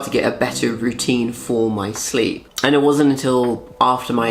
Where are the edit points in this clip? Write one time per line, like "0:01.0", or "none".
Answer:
none